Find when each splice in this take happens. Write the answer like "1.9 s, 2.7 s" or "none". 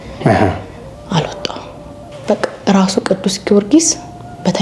2.1 s

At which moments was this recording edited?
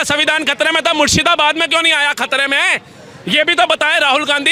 none

